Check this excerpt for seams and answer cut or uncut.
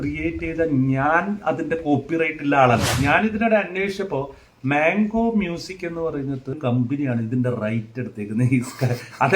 cut